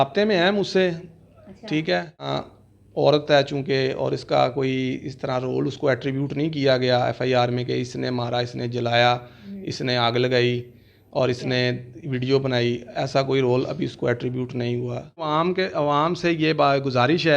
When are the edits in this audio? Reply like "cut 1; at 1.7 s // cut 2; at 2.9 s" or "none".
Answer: cut 1; at 2.3 s // cut 2; at 15.3 s